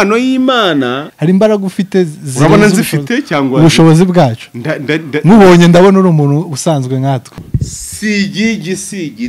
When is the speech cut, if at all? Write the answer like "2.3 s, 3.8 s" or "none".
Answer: 1.1 s, 7.5 s